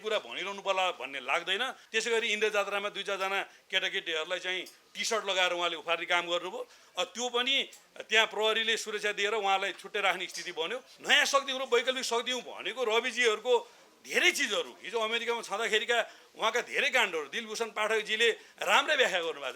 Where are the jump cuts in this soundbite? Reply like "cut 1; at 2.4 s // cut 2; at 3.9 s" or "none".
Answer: cut 1; at 1.8 s // cut 2; at 10.9 s